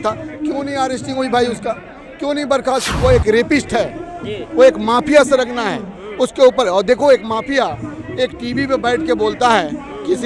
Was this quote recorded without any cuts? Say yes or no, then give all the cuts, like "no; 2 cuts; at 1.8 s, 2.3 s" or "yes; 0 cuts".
no; 1 cut; at 2.9 s